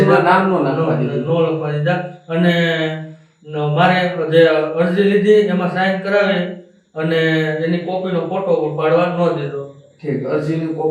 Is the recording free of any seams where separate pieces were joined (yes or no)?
yes